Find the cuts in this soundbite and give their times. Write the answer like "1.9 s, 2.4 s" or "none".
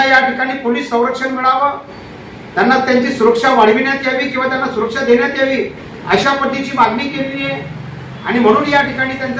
none